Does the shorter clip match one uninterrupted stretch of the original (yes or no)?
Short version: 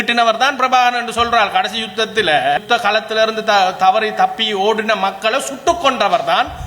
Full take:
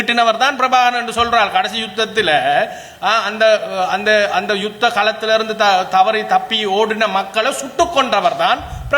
no